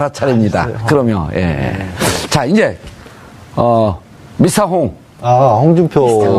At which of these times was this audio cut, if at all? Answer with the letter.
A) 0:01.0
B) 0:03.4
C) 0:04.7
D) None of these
C